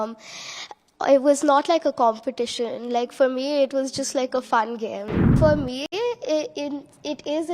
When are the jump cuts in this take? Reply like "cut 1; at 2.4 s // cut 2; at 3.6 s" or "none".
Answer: cut 1; at 5.3 s